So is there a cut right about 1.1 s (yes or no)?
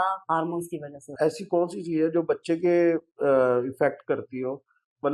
yes